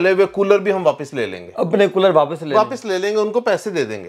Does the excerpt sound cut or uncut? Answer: uncut